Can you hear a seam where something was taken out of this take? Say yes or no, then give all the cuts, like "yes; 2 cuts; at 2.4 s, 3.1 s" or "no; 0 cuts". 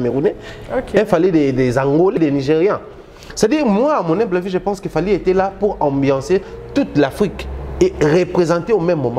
yes; 1 cut; at 2.2 s